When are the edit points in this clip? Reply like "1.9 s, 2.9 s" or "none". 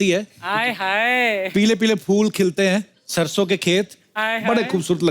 1.5 s, 3.0 s